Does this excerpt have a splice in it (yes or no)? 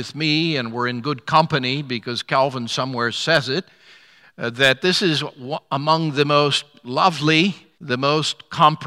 yes